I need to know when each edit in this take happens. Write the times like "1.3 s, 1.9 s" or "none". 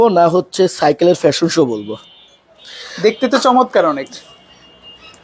none